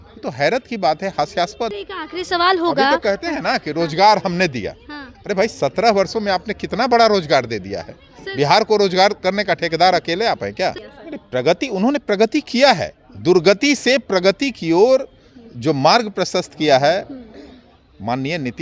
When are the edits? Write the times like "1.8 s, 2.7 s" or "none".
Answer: 1.8 s, 10.9 s